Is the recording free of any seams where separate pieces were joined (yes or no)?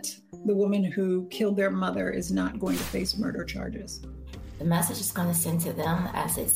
yes